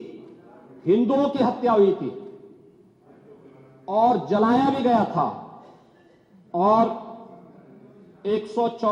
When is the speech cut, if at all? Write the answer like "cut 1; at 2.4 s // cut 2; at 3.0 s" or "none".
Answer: none